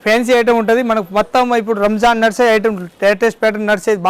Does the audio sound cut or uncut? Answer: uncut